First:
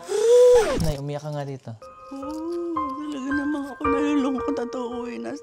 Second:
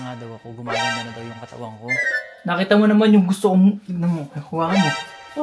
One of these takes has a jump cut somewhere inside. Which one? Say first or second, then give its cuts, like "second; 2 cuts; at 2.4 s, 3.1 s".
second; 1 cut; at 2.2 s